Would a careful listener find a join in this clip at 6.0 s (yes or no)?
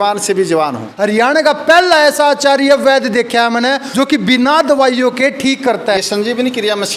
yes